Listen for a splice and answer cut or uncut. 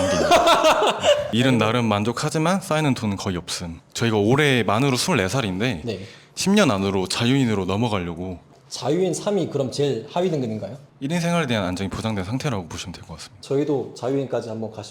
uncut